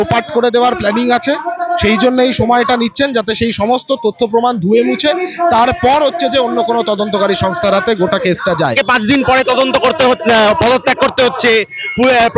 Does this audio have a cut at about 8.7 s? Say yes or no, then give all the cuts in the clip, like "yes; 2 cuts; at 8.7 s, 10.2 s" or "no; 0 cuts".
yes; 1 cut; at 8.7 s